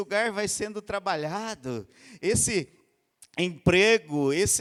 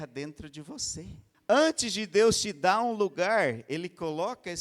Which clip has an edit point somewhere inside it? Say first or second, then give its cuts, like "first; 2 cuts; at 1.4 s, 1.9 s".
second; 1 cut; at 1.2 s